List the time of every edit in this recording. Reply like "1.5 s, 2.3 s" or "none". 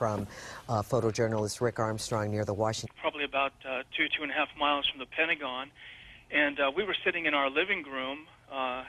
none